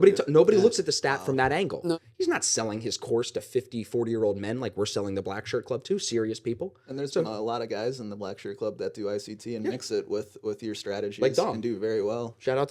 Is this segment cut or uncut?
cut